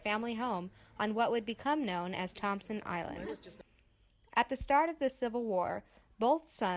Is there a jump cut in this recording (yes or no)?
no